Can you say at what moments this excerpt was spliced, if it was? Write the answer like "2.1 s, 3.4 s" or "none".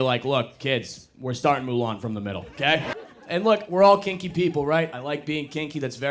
2.9 s